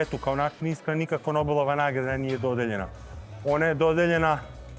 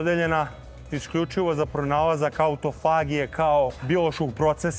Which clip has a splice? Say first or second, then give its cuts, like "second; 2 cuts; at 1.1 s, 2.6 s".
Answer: second; 1 cut; at 3.8 s